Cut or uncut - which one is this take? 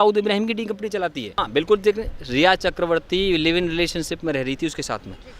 cut